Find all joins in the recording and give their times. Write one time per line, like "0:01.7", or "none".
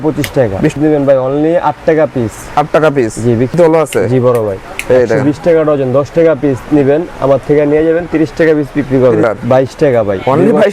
0:00.8
0:03.5
0:09.2